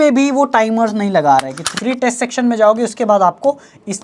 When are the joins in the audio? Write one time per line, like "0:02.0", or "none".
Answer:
0:01.6